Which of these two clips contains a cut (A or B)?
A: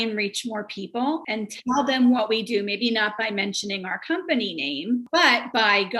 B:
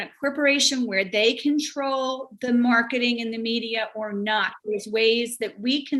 A